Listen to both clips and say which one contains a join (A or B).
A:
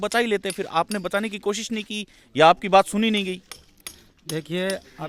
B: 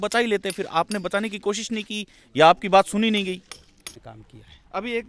B